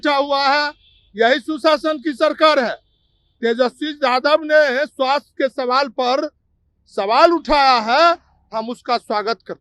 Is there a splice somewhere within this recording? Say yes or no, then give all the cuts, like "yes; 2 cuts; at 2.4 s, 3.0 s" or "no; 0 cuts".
no; 0 cuts